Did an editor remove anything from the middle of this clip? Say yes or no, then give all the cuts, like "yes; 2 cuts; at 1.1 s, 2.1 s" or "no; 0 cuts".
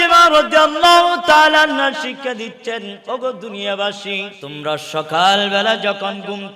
yes; 1 cut; at 4.4 s